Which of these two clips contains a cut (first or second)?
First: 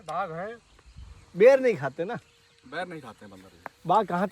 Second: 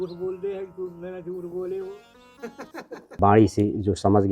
second